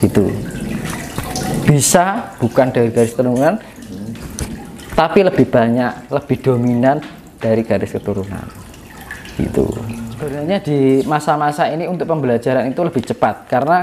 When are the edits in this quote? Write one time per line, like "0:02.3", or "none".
0:10.4